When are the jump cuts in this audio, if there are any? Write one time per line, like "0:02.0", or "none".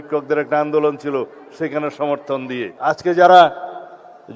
0:02.7